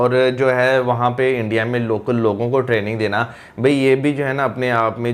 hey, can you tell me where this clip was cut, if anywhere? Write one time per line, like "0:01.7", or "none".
none